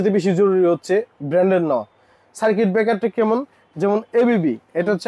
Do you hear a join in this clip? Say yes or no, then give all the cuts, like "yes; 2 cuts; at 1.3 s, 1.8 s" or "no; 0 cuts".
no; 0 cuts